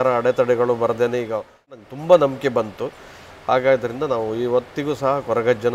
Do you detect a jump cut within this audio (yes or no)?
yes